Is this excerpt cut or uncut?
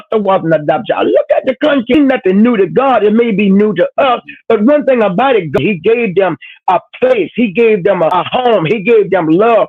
uncut